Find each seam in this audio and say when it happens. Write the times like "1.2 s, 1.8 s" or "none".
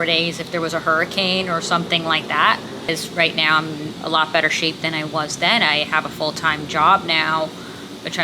2.9 s